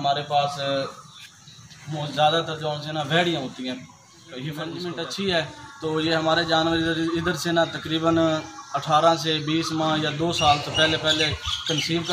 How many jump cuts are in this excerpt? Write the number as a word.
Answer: one